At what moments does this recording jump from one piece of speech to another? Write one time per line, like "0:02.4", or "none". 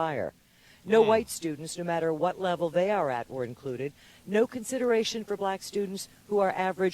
0:04.1